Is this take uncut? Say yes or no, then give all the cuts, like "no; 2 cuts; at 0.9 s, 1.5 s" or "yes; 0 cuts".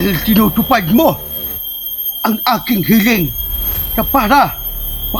yes; 0 cuts